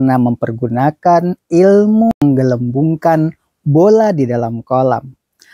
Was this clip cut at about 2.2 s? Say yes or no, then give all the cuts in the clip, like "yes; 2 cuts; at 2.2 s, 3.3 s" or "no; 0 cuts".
yes; 1 cut; at 2.2 s